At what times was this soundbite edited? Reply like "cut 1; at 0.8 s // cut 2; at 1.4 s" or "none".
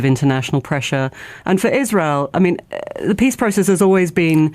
cut 1; at 1.1 s